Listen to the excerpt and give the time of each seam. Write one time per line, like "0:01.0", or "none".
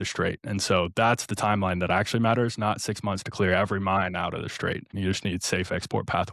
0:04.9